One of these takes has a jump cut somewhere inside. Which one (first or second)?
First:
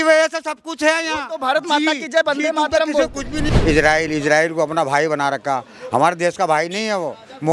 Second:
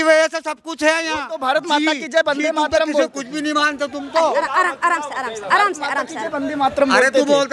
first